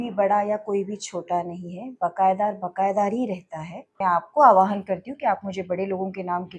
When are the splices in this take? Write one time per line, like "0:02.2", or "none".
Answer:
0:04.0